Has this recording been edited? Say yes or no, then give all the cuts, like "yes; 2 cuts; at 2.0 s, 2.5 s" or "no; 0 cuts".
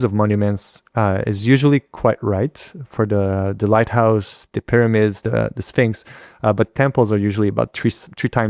no; 0 cuts